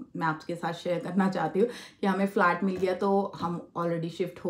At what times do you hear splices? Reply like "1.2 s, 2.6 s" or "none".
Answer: none